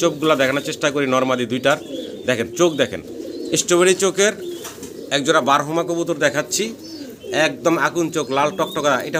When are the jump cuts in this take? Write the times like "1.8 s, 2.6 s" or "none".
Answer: none